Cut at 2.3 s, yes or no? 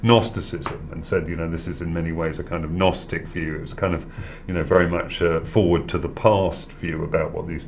yes